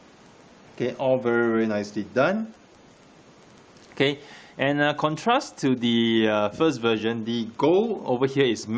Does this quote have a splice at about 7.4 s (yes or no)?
no